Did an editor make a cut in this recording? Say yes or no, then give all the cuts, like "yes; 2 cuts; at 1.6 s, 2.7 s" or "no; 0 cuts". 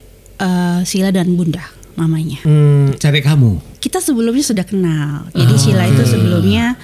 yes; 2 cuts; at 2.3 s, 3.7 s